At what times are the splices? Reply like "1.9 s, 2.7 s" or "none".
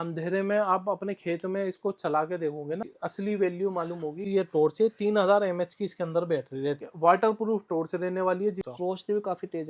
3.0 s, 4.3 s, 6.8 s, 8.7 s

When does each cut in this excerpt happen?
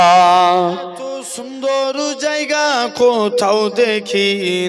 1.4 s

